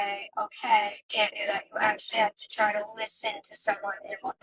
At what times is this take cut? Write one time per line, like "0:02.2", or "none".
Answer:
0:01.0